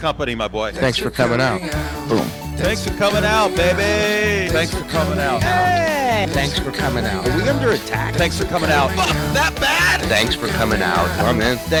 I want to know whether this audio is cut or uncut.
uncut